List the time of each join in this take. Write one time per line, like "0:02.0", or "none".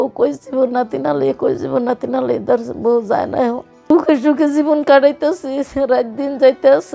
0:03.9